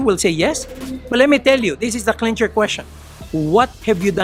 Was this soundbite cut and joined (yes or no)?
no